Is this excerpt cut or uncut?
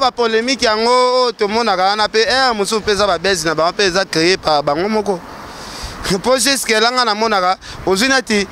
uncut